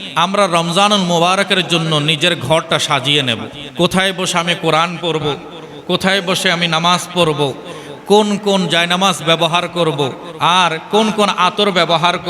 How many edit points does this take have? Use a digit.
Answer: 2